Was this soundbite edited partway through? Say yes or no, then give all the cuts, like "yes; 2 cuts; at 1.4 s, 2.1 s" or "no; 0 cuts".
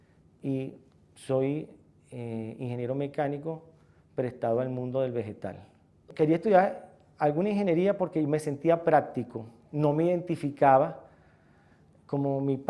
yes; 1 cut; at 8.7 s